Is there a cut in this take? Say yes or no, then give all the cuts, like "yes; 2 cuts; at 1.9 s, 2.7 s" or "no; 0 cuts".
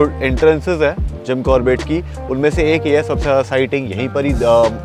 no; 0 cuts